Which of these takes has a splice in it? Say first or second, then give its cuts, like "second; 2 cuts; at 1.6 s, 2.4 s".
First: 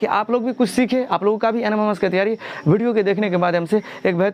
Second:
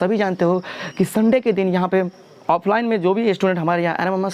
first; 1 cut; at 1.1 s